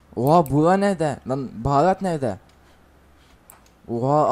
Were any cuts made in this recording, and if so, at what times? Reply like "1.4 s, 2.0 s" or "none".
none